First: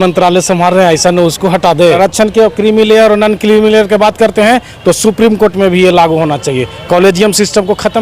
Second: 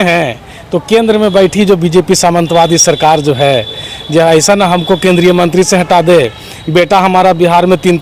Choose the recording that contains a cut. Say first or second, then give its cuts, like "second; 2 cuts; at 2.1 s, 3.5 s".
first; 1 cut; at 2.0 s